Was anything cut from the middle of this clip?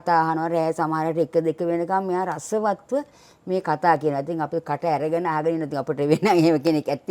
no; 0 cuts

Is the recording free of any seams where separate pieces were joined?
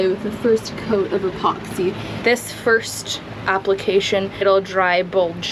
no; 2 cuts; at 2.1 s, 4.4 s

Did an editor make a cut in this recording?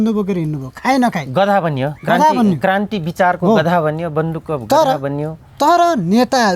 no; 0 cuts

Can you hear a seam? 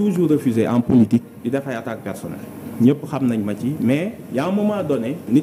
no; 0 cuts

